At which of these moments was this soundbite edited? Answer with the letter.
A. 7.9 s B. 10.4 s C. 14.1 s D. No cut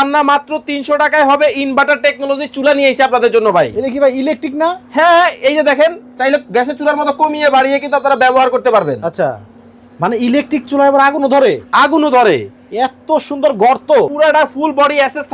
C